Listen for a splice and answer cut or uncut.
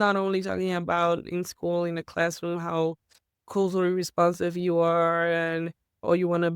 uncut